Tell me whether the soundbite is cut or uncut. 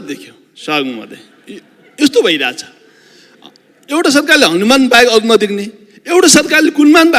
uncut